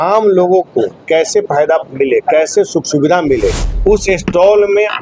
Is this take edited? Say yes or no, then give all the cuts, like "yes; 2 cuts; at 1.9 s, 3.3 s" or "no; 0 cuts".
yes; 1 cut; at 3.7 s